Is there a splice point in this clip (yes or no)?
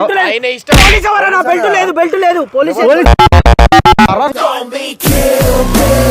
no